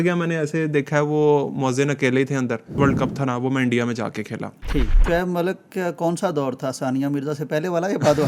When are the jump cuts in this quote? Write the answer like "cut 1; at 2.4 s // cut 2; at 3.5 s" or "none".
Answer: cut 1; at 2.8 s // cut 2; at 5.0 s